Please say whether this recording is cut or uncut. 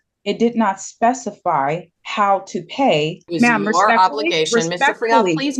cut